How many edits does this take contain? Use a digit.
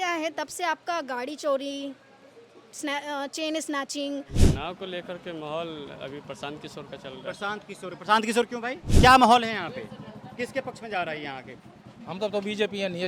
2